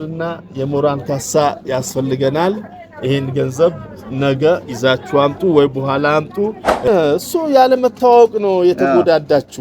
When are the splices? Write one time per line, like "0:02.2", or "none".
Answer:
0:06.8